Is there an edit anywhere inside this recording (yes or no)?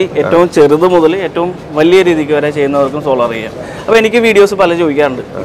no